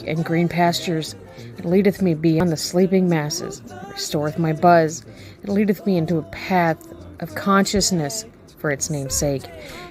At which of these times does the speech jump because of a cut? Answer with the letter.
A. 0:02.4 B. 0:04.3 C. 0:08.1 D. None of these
A